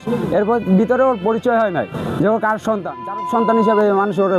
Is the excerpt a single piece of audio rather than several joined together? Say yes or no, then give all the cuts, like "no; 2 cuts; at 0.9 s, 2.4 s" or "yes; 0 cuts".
yes; 0 cuts